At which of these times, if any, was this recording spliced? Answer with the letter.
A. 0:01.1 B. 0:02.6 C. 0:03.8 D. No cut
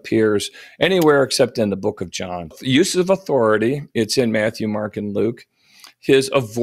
B